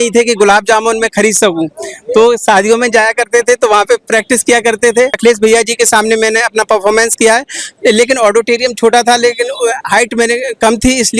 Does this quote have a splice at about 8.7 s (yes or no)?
no